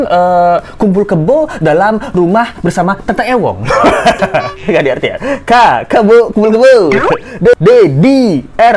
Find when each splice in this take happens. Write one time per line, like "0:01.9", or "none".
none